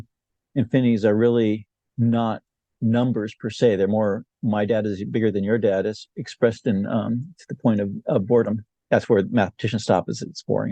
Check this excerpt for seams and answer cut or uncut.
cut